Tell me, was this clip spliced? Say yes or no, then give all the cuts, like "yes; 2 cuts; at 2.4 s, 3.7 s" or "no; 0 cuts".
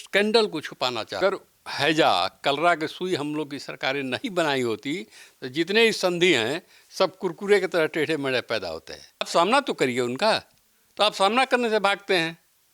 yes; 2 cuts; at 1.2 s, 9.3 s